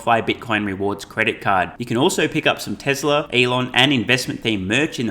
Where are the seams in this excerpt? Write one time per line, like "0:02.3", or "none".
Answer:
0:03.3